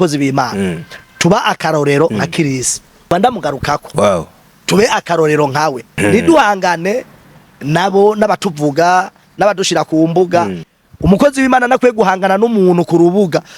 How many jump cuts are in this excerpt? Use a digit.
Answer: 3